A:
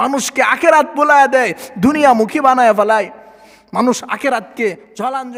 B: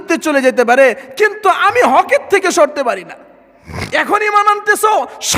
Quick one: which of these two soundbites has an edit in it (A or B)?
B